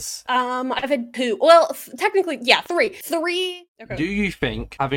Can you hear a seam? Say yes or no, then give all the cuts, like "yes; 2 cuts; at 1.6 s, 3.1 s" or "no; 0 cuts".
yes; 1 cut; at 3.6 s